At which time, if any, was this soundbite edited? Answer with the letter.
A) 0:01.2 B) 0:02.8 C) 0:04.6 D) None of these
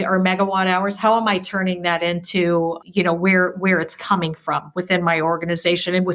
B